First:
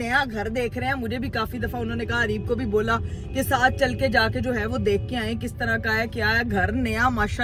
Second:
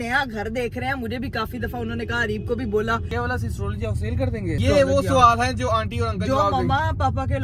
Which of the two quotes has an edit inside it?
second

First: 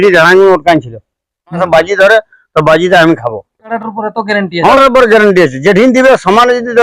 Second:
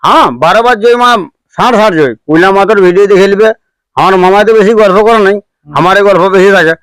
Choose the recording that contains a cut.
first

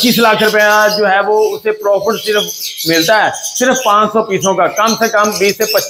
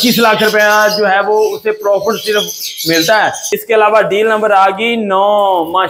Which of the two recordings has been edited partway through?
second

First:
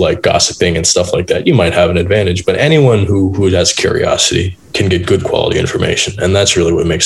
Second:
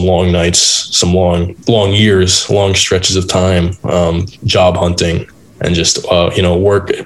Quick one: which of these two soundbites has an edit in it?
second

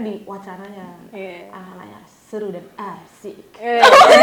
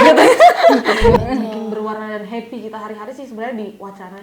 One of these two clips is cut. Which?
second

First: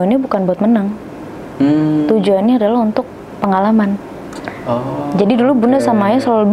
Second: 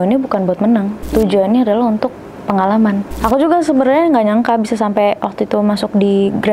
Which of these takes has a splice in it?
second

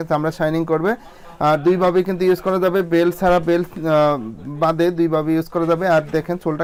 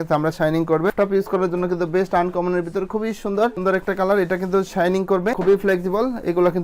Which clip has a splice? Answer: second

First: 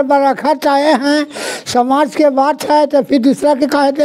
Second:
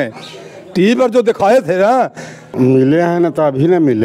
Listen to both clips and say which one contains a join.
second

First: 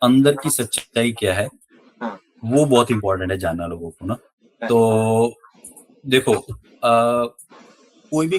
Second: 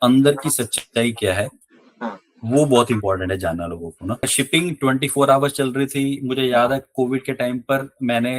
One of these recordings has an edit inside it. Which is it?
second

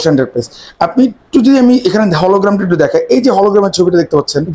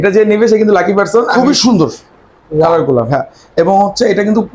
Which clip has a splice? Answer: second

